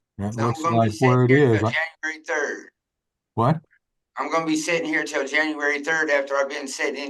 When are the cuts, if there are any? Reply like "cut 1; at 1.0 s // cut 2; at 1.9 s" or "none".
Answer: none